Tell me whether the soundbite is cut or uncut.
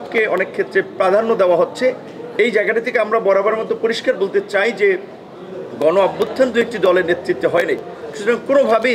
uncut